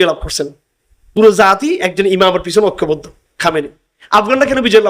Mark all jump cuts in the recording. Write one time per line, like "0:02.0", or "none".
0:01.0